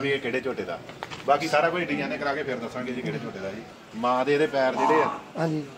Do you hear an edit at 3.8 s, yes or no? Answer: yes